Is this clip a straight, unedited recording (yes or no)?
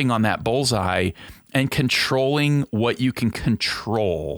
no